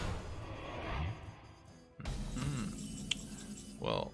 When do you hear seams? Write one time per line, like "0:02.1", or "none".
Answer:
none